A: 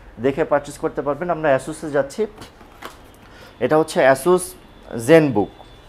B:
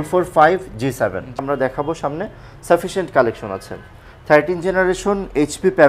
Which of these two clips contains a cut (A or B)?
B